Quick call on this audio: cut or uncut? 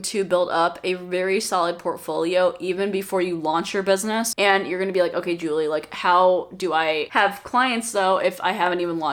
uncut